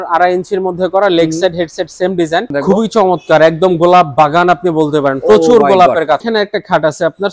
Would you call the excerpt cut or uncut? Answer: cut